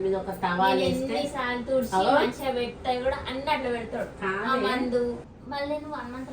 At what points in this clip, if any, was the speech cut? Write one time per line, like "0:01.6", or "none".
0:05.3